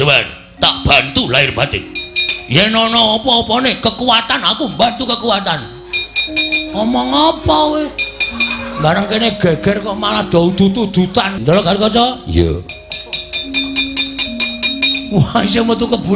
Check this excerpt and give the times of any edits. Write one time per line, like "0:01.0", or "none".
0:11.4